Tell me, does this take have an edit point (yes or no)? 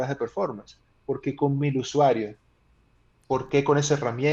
no